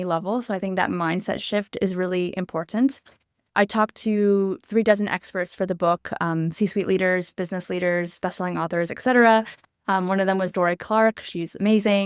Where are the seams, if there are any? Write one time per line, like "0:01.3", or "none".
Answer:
0:03.5